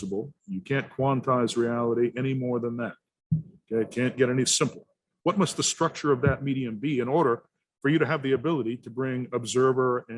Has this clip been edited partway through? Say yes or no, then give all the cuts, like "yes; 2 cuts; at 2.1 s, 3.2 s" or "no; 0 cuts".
yes; 1 cut; at 5.0 s